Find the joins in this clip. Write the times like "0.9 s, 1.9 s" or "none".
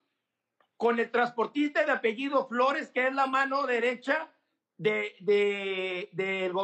none